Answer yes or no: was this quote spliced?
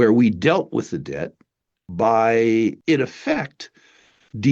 yes